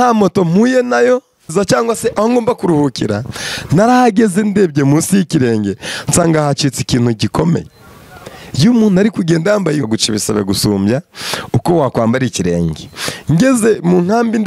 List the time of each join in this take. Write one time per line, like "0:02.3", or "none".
0:01.5
0:09.9